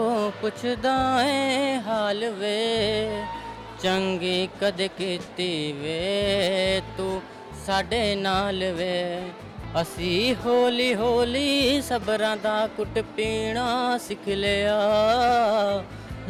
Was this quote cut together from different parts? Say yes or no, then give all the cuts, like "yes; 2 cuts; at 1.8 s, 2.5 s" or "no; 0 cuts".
no; 0 cuts